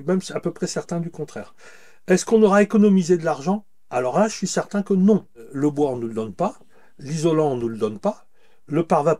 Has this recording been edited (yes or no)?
yes